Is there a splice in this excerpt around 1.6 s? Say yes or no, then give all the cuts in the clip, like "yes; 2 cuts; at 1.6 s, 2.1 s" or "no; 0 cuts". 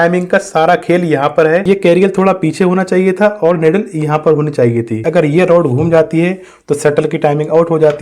yes; 2 cuts; at 1.6 s, 5.1 s